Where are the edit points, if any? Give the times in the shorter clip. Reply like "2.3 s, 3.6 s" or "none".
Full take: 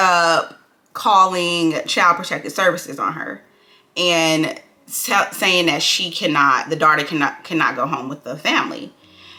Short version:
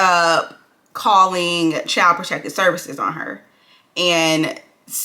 none